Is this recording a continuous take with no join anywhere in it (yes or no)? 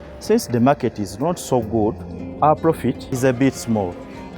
no